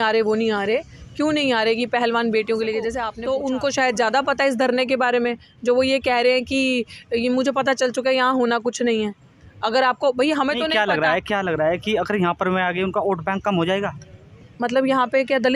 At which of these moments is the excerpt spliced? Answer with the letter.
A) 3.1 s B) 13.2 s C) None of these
A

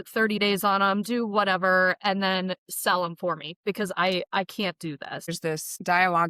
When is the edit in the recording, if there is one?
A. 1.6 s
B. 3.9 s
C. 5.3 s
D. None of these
C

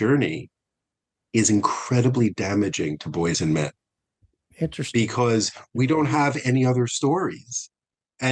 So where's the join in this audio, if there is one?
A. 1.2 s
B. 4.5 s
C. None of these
C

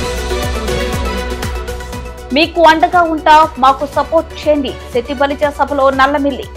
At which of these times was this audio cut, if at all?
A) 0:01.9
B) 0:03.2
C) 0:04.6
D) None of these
A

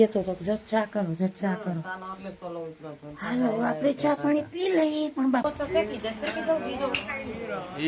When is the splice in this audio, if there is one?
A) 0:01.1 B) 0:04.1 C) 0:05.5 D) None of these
C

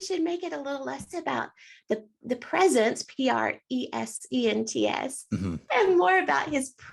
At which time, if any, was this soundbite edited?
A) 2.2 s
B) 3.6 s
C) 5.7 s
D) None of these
C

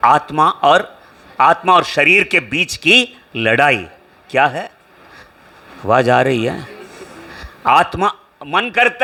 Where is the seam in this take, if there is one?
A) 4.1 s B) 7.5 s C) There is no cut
C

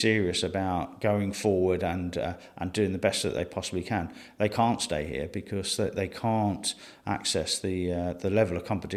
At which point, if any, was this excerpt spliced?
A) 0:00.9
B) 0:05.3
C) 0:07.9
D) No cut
A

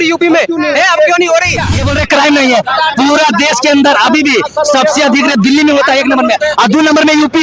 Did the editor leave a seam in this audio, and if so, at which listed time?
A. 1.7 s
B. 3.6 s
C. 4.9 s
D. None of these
A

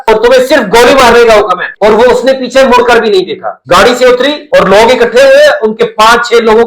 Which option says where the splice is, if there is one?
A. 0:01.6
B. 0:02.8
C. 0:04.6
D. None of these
A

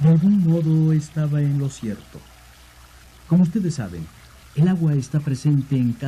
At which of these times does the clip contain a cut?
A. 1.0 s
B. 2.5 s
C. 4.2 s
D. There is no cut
B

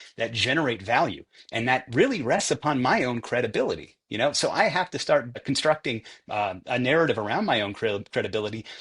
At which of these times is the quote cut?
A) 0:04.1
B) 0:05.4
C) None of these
B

